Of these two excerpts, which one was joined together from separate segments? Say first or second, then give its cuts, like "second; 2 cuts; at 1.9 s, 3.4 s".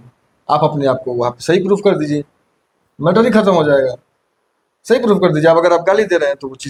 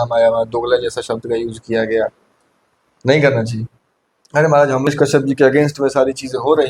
second; 1 cut; at 4.9 s